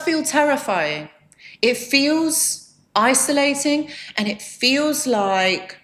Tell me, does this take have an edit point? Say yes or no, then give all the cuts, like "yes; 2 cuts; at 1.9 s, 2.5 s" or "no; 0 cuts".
no; 0 cuts